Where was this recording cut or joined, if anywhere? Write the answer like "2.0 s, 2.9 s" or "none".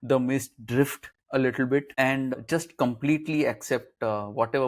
2.4 s